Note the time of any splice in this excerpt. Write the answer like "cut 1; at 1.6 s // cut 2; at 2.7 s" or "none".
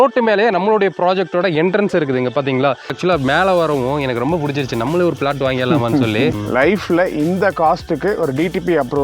cut 1; at 3.0 s // cut 2; at 6.4 s